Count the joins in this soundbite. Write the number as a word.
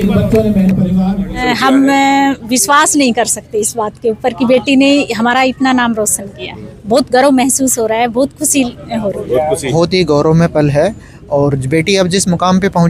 two